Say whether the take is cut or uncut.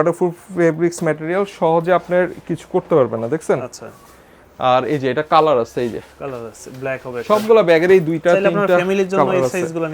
uncut